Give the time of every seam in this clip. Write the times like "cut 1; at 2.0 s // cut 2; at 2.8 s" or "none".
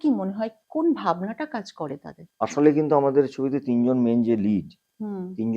cut 1; at 2.3 s